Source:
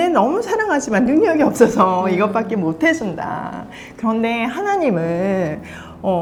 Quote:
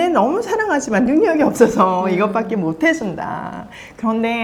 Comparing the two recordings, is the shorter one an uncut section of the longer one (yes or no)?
yes